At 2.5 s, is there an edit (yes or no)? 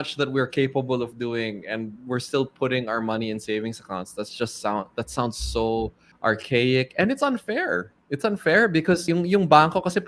no